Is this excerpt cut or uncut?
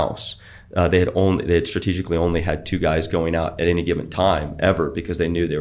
uncut